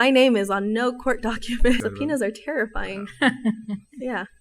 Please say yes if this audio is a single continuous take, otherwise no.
no